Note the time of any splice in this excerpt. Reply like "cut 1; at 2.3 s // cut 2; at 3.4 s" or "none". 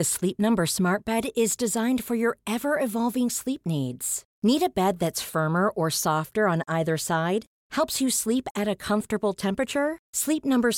none